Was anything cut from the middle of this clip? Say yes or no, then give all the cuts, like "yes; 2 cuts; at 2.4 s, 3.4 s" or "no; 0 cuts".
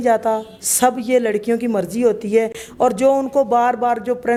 no; 0 cuts